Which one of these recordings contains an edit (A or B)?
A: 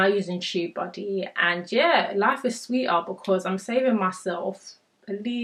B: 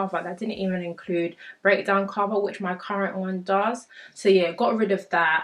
B